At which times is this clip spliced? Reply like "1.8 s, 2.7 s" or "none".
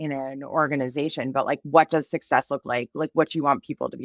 none